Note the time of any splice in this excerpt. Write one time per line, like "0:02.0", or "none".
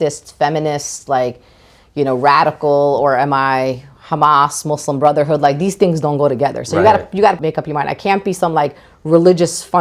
none